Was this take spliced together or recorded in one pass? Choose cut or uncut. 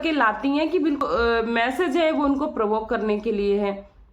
cut